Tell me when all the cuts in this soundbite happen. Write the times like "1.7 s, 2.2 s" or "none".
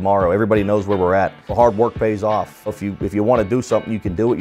1.5 s, 2.8 s